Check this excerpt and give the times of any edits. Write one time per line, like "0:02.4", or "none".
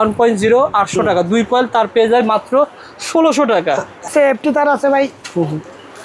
0:04.1